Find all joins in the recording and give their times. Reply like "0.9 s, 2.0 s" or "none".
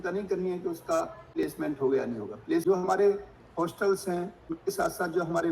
1.5 s, 2.6 s, 4.5 s